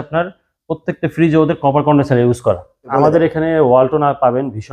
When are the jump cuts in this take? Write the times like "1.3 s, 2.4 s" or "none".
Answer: 2.9 s